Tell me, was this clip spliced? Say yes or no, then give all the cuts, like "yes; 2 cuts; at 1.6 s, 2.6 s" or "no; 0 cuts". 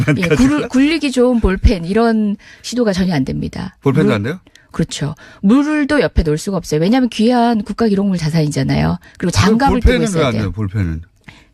yes; 1 cut; at 2.7 s